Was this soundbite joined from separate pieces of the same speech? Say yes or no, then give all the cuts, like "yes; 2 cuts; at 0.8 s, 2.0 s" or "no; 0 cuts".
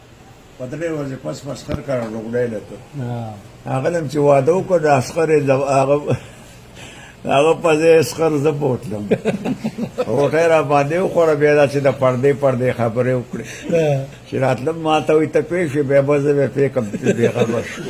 no; 0 cuts